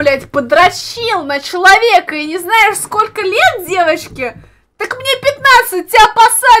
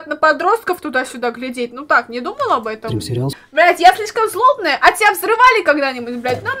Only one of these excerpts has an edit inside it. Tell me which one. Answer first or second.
second